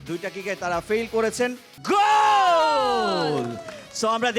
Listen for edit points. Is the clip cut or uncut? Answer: cut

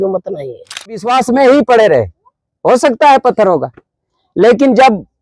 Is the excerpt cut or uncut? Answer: cut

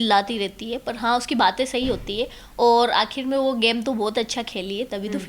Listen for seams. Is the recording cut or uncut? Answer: uncut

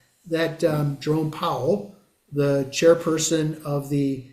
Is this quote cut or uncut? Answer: uncut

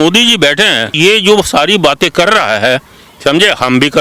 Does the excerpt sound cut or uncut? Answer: cut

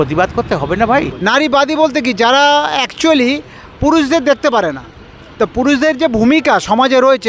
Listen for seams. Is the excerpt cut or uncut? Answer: cut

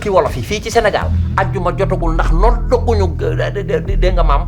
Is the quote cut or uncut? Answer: uncut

